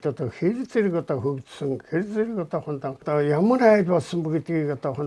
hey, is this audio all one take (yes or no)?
no